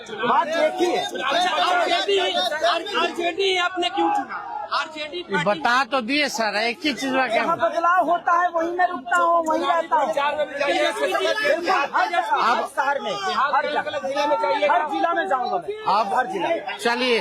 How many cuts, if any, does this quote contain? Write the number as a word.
zero